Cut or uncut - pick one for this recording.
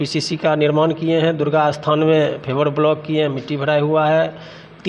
uncut